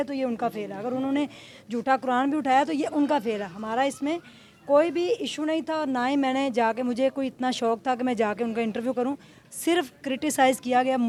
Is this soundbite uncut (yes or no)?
yes